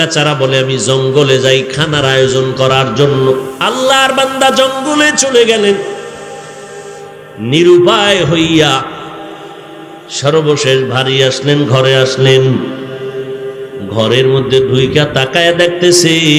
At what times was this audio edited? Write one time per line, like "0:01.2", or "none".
0:03.5